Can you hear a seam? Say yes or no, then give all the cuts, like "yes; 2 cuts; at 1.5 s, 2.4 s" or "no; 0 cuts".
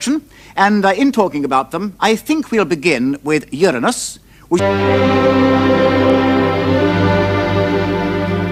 no; 0 cuts